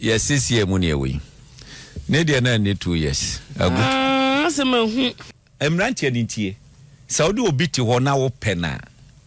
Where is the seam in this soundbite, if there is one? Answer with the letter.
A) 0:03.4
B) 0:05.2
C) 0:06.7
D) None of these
B